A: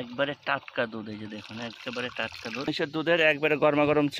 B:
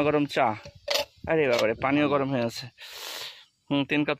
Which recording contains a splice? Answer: A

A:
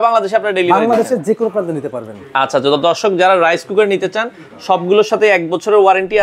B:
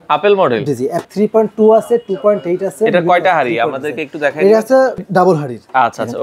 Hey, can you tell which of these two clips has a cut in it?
B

